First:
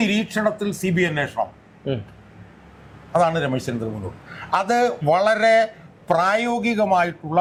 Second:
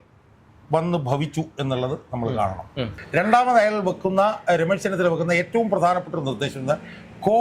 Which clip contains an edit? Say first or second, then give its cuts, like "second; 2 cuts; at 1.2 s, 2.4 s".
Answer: second; 1 cut; at 2.9 s